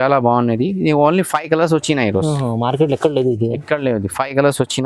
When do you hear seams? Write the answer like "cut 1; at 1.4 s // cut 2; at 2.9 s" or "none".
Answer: none